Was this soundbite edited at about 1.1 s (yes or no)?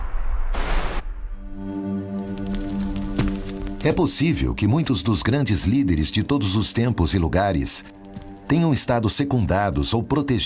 yes